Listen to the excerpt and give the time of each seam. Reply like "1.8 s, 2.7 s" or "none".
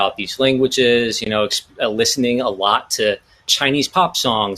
3.5 s